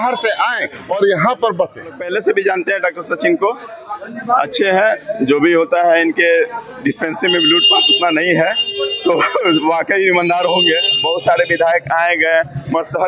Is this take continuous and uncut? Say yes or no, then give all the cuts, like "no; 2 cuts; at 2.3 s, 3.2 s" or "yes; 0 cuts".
no; 2 cuts; at 2.1 s, 11.0 s